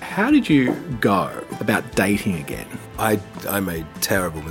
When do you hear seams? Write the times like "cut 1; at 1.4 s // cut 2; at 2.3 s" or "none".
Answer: cut 1; at 1.5 s // cut 2; at 2.8 s